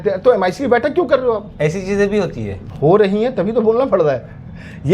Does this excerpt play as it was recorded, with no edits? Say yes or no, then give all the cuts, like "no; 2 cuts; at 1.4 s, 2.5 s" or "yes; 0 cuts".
yes; 0 cuts